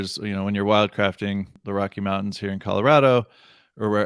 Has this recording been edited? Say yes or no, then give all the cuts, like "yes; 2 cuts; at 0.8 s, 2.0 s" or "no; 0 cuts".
yes; 1 cut; at 1.6 s